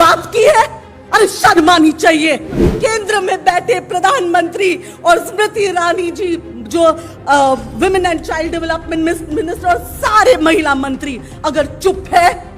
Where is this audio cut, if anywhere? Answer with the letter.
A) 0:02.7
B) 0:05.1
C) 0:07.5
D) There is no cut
A